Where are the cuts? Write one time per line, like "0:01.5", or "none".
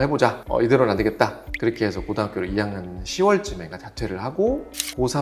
0:01.5